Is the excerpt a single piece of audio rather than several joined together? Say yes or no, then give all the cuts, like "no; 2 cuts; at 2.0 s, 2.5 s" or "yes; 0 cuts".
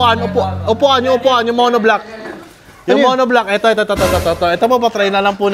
yes; 0 cuts